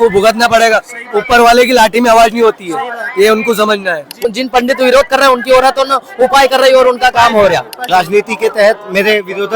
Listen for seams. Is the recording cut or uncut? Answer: cut